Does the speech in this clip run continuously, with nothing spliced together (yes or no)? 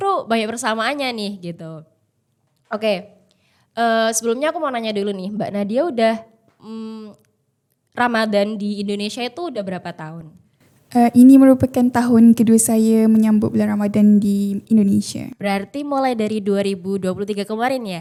yes